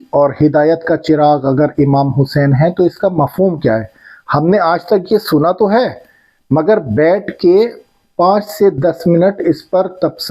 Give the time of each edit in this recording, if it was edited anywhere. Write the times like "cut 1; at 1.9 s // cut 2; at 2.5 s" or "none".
none